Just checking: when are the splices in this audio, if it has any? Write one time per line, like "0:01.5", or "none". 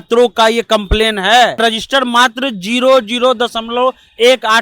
0:01.6